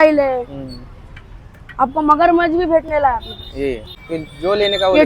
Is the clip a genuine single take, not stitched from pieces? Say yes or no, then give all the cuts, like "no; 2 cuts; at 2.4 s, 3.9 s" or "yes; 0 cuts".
no; 1 cut; at 4.0 s